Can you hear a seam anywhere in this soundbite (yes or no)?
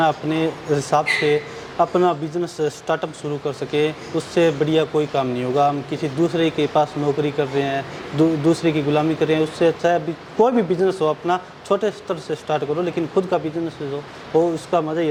no